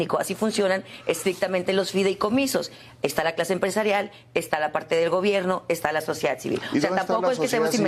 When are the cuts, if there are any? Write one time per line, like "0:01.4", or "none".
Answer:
none